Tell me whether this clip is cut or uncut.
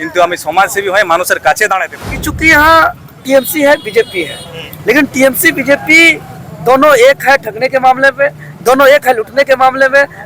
cut